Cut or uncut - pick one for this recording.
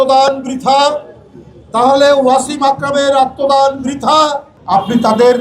cut